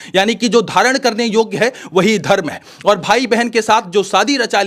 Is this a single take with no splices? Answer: yes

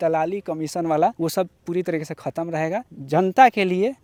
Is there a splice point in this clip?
no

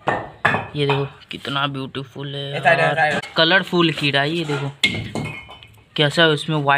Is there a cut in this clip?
yes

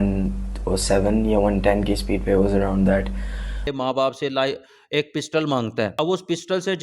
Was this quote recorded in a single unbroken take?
no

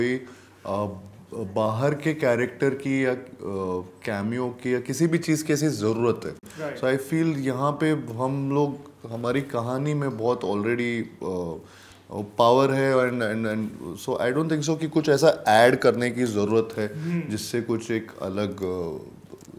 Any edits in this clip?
no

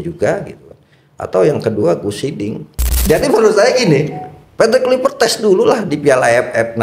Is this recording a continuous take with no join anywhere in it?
no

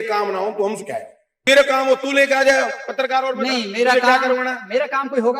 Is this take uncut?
no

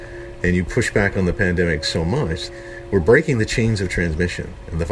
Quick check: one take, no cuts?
no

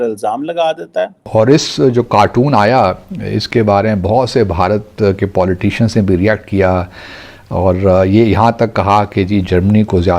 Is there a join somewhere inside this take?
yes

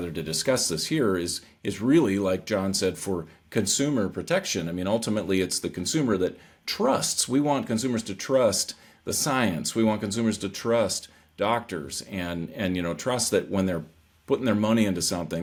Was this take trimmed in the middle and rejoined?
no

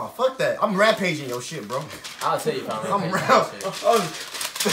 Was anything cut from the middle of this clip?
no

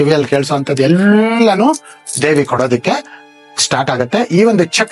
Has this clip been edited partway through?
no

